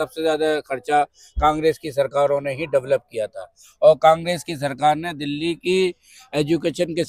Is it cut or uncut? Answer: uncut